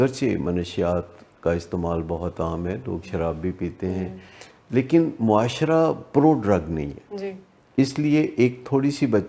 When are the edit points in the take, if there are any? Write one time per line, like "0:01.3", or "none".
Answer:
none

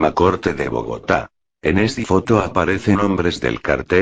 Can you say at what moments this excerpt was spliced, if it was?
0:00.9

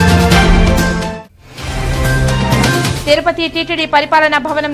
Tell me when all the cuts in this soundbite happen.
0:01.3
0:02.8

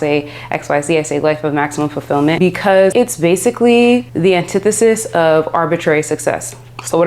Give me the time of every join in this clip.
0:02.9
0:04.1

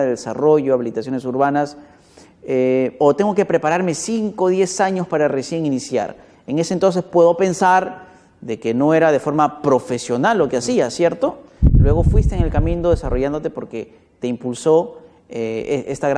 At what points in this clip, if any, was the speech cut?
none

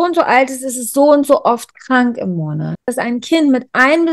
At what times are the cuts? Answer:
0:02.9

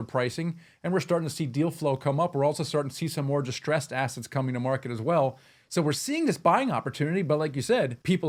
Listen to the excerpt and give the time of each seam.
none

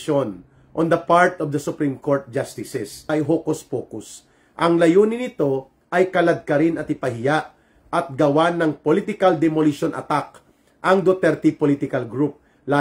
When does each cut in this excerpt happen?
0:03.0

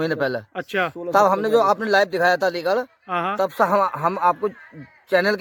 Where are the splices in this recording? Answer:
none

